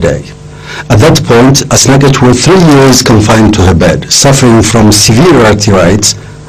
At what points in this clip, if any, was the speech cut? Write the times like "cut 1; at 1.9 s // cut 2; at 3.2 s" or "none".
cut 1; at 4.7 s